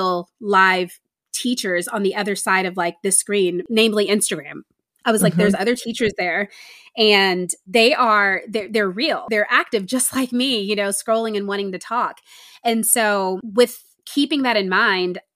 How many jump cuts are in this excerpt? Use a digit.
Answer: 4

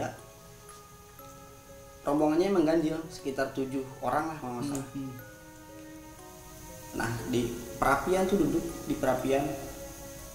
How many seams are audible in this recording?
0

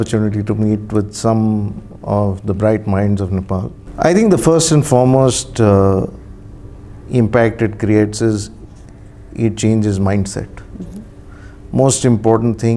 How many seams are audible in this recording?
1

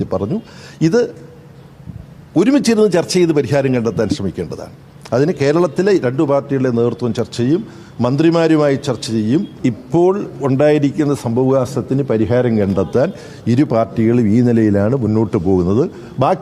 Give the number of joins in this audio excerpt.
1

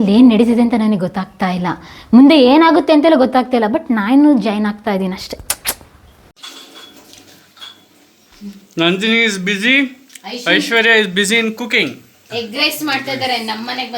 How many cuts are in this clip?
1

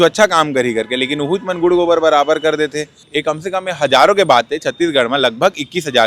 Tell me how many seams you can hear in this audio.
1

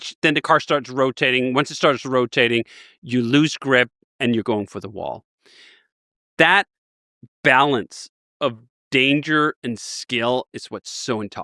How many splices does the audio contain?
0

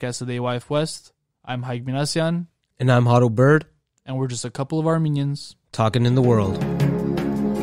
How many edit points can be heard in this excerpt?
1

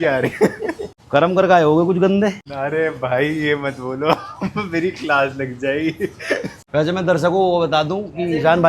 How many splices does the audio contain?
3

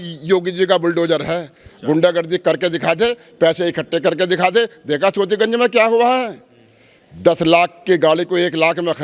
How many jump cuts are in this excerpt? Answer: 0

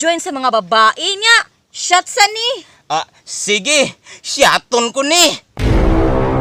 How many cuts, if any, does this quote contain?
0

